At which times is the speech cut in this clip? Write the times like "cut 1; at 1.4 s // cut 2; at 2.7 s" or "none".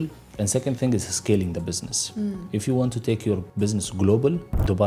cut 1; at 3.5 s